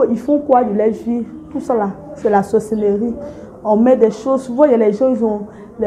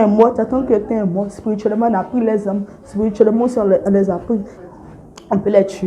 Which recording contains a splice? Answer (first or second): second